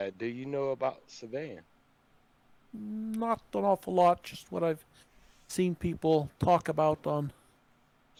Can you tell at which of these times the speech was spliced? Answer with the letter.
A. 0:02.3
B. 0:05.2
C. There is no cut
C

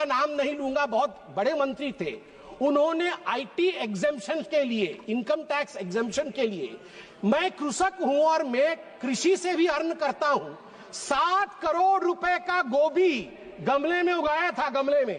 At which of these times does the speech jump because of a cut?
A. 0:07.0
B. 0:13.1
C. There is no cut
C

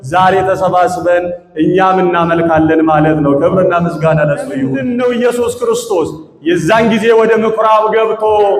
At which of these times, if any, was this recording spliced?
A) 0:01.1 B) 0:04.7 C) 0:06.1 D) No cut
B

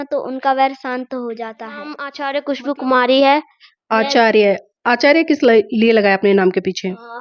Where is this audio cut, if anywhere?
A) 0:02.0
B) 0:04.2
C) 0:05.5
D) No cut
A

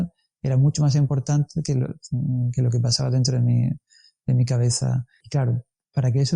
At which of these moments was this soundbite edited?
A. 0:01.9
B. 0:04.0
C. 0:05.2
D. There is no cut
C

